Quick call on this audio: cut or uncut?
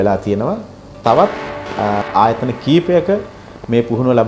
uncut